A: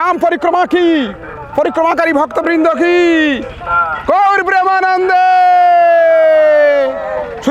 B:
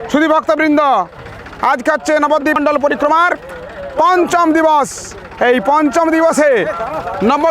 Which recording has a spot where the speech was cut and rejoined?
B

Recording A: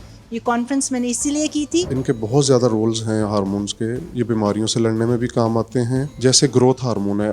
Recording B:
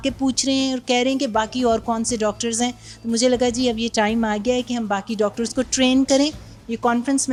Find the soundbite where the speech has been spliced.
A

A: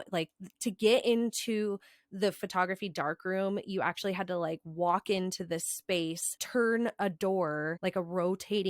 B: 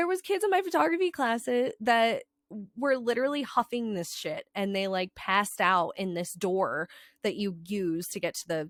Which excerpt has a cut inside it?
A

